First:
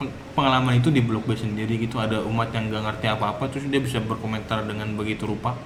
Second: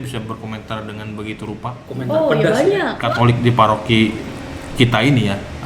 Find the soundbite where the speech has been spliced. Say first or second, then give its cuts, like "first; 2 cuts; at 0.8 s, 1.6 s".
second; 1 cut; at 2.9 s